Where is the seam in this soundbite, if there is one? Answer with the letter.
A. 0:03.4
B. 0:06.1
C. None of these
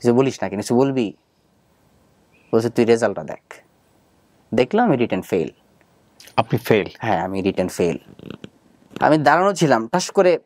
C